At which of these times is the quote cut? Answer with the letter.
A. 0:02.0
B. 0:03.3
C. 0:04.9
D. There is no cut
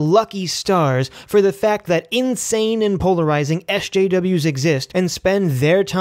C